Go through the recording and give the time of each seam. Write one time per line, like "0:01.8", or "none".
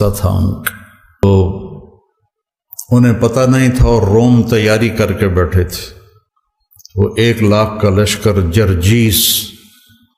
0:01.2

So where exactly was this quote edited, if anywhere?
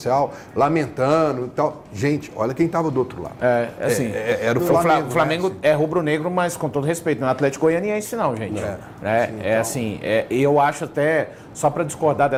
none

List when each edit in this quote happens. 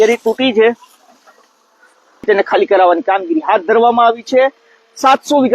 0:02.2

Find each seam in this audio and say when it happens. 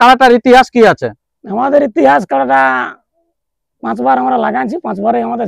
none

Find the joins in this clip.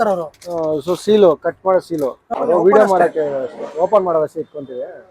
0:02.2

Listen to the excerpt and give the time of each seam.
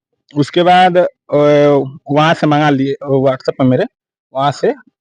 none

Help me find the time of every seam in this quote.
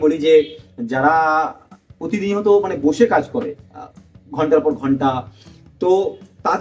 none

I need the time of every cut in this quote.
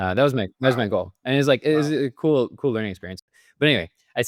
0:03.1

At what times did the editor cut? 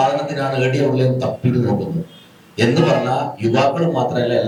none

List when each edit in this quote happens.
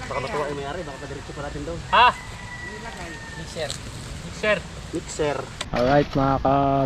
0:05.6

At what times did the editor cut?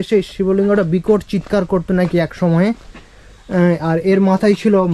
none

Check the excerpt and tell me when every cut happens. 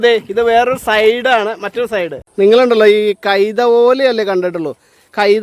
0:02.2

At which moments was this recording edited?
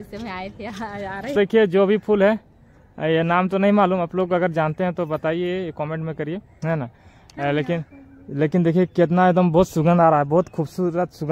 0:01.3

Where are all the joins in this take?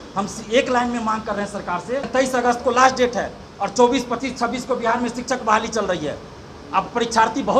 0:02.1

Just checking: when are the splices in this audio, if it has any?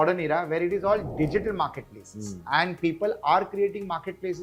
none

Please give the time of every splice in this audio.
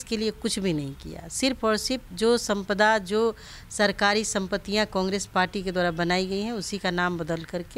none

